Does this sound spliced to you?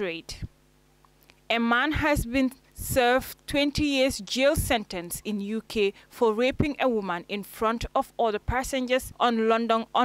yes; 1 cut; at 9.1 s

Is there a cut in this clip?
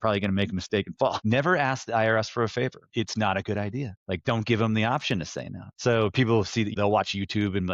yes; 5 cuts; at 1.2 s, 2.8 s, 3.9 s, 5.6 s, 6.7 s

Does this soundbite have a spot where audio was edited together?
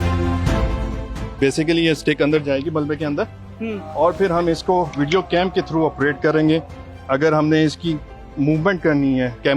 yes; 1 cut; at 1.2 s

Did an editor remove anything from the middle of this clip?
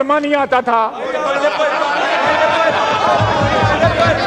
no; 0 cuts

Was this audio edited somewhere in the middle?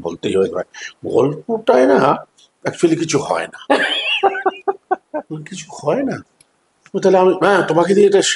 no; 0 cuts

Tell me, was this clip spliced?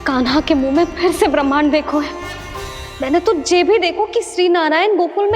yes; 1 cut; at 2.5 s

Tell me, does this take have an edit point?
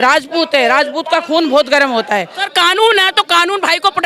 yes; 1 cut; at 2.4 s

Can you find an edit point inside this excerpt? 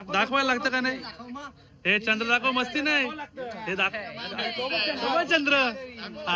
no; 0 cuts

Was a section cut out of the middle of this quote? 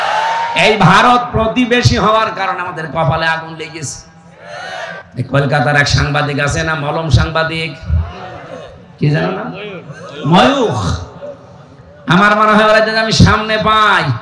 yes; 1 cut; at 5.0 s

